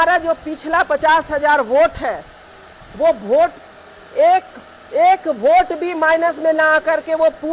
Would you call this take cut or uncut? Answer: uncut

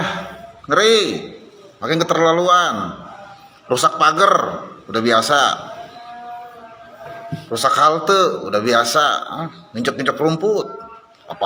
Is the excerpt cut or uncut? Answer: uncut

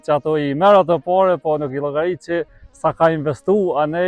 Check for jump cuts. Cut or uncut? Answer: uncut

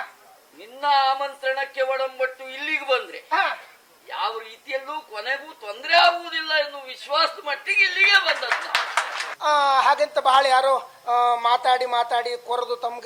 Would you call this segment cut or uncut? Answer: cut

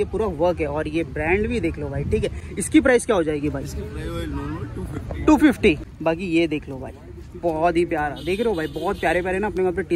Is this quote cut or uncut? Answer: uncut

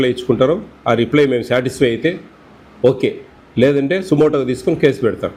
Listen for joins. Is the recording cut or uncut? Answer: uncut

